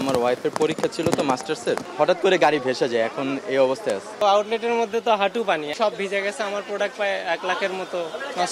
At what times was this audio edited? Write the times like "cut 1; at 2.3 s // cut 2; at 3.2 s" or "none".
cut 1; at 1.9 s // cut 2; at 4.1 s // cut 3; at 5.7 s